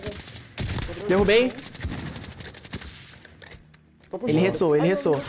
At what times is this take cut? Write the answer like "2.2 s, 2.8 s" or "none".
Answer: none